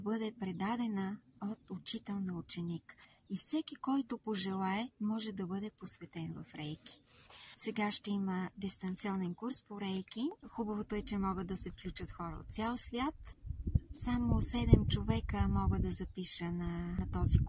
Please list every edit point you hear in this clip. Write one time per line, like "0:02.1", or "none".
0:10.4